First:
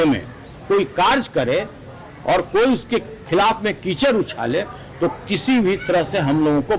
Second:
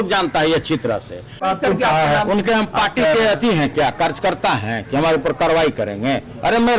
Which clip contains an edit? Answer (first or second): second